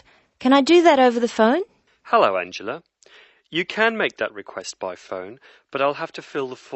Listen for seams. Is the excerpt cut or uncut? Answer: uncut